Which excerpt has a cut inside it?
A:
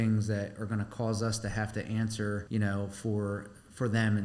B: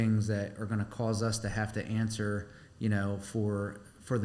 A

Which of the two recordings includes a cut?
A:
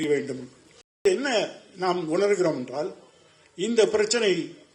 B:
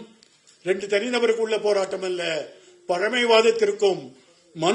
A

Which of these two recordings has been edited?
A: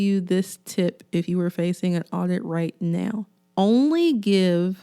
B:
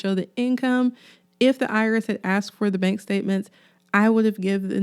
A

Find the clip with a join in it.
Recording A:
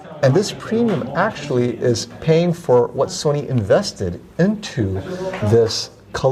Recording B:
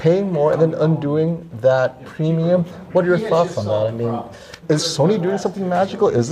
B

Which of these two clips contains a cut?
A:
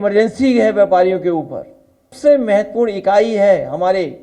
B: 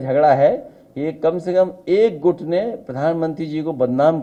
A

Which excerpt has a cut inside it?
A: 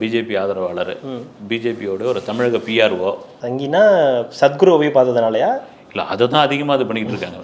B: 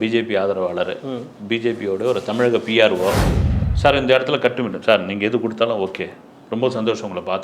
B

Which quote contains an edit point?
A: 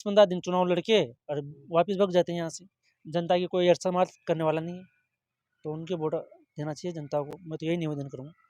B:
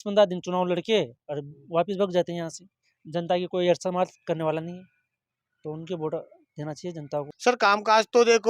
B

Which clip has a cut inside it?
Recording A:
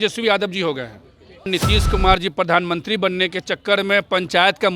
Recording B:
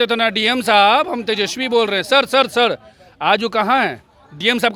A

